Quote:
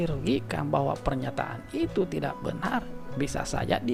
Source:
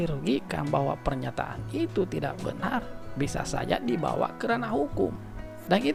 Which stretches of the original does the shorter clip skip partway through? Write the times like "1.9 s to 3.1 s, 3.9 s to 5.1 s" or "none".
none